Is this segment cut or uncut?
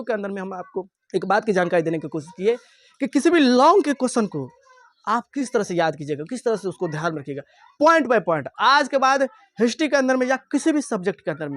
cut